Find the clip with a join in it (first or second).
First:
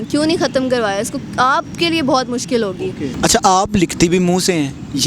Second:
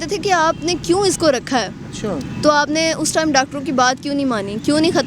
first